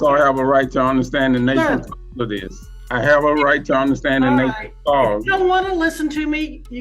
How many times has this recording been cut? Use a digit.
1